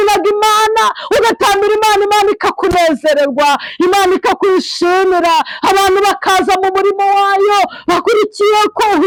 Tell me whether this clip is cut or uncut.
uncut